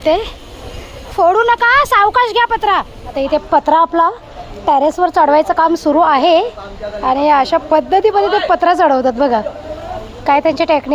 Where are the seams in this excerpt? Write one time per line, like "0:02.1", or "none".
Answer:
0:03.0